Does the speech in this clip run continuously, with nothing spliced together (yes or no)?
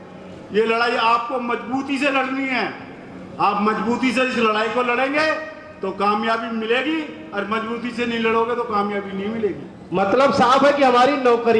no